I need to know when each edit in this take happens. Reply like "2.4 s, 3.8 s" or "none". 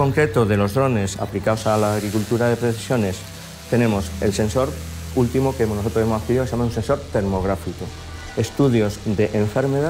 none